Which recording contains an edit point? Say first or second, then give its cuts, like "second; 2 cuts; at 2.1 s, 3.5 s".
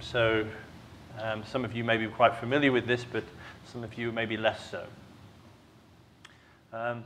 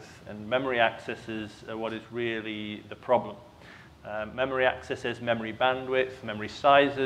first; 1 cut; at 4.7 s